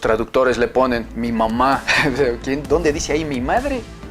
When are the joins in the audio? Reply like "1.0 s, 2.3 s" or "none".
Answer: 1.1 s